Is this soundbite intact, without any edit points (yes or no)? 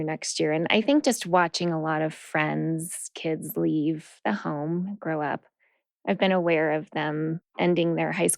no